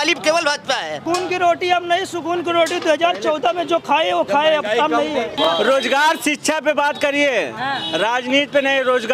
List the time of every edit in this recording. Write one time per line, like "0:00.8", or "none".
0:01.0
0:05.3